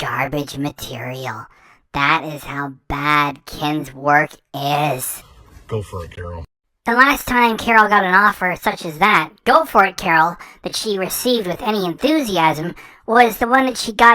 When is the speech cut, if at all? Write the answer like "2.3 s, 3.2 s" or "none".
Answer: 5.2 s, 6.5 s